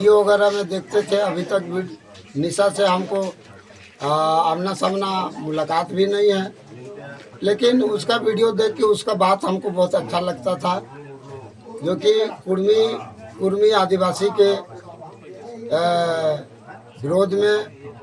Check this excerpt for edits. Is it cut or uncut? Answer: uncut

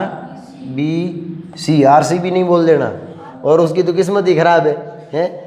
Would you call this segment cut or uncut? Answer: cut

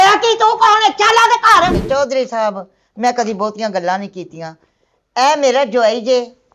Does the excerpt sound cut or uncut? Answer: cut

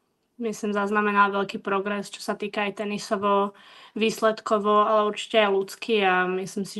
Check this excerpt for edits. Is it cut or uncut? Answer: uncut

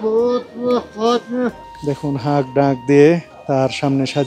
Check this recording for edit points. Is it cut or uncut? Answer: cut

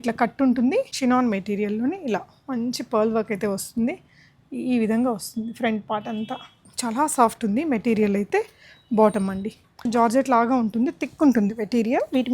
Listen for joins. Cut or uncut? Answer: cut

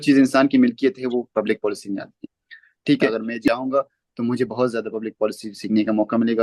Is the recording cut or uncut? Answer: cut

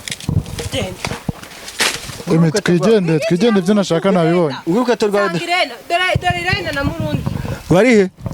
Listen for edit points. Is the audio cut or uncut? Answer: uncut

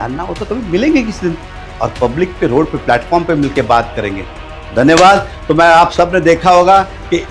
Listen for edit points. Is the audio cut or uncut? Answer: uncut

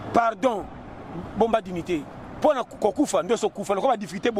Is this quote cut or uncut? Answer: uncut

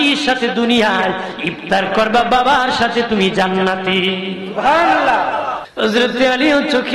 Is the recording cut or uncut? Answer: cut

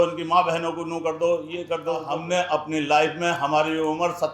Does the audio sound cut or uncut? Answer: cut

